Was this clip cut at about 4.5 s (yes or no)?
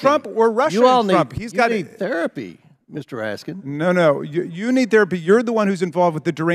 no